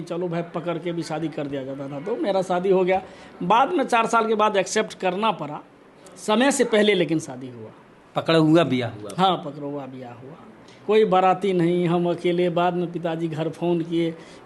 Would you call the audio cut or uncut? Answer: uncut